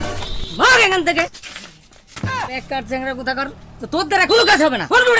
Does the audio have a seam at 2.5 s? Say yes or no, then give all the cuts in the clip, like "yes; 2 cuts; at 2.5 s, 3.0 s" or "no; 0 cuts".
yes; 1 cut; at 2.5 s